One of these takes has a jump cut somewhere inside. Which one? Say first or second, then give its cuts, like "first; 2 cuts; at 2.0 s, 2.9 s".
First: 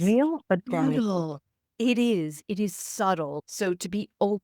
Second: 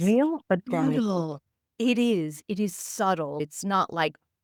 first; 1 cut; at 3.4 s